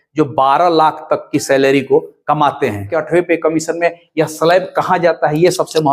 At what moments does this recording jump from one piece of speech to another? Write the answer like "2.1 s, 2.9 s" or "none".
3.0 s